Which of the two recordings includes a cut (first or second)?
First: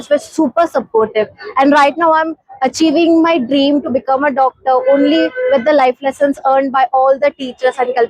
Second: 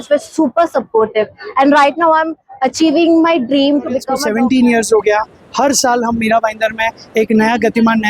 second